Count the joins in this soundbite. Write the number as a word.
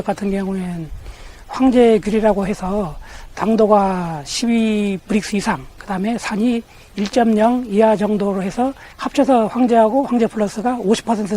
one